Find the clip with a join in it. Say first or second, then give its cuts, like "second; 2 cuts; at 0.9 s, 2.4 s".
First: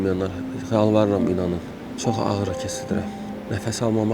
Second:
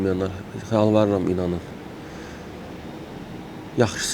first; 2 cuts; at 1.9 s, 3.3 s